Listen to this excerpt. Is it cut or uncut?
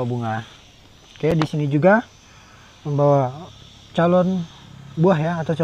uncut